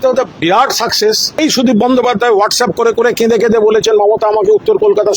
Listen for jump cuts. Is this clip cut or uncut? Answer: cut